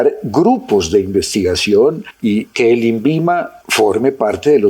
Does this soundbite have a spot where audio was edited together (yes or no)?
yes